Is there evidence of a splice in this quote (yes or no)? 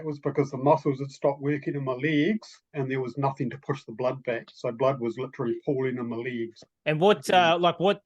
yes